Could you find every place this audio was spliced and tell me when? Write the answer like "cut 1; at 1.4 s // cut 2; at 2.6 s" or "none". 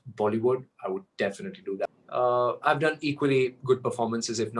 cut 1; at 1.8 s